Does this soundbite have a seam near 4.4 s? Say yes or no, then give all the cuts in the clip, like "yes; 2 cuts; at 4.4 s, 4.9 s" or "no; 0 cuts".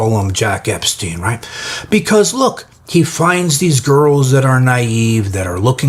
no; 0 cuts